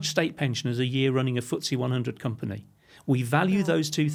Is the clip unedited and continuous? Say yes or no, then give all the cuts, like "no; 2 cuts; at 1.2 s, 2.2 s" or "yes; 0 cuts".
yes; 0 cuts